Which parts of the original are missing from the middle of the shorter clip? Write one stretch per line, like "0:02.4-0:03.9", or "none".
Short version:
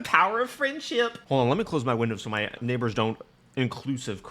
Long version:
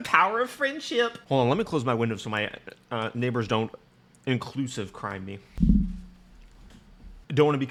0:02.6-0:03.1
0:03.9-0:04.0